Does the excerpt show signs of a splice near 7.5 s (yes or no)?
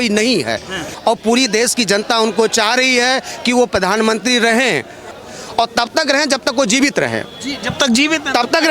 no